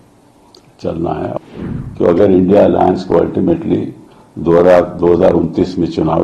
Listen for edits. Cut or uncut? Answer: cut